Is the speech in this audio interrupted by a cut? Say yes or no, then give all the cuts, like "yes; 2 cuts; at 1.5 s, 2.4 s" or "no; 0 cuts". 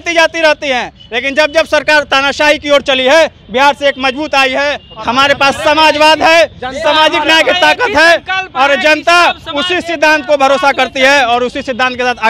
yes; 1 cut; at 4.9 s